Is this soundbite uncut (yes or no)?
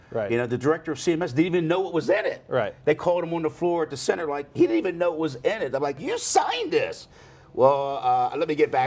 no